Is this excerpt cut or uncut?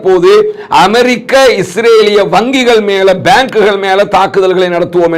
uncut